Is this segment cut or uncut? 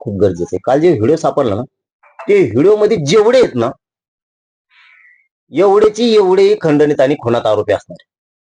uncut